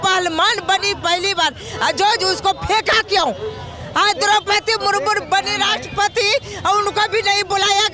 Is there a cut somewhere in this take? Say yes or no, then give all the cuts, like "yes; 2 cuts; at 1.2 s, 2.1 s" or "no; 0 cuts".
no; 0 cuts